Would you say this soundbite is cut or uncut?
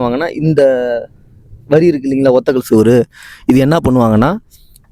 uncut